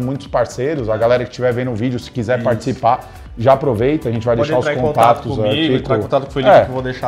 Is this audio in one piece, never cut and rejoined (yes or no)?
yes